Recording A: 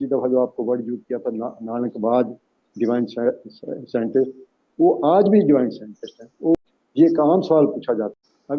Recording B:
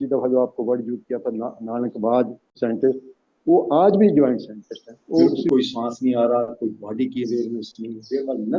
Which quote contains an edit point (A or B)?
B